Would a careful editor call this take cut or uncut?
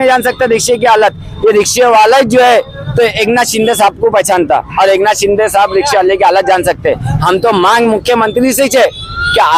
uncut